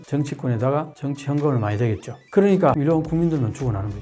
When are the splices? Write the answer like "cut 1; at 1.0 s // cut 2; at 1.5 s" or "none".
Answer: cut 1; at 2.2 s // cut 2; at 2.8 s